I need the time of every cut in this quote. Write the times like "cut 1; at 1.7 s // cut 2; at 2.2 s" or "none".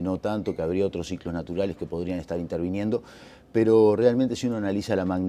none